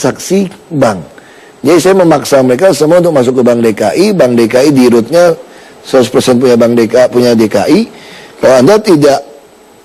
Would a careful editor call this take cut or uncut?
cut